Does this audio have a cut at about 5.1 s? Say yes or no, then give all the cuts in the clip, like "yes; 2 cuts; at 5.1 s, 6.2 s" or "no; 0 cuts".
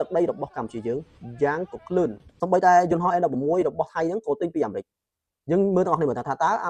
no; 1 cut; at 2.3 s